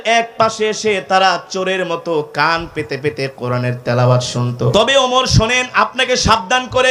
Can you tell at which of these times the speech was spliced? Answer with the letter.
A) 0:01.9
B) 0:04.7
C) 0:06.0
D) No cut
B